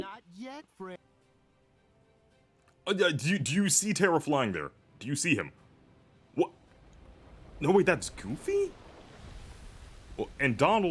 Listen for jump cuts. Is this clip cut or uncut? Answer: cut